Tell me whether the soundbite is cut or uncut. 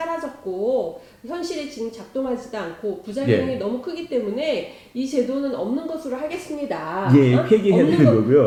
uncut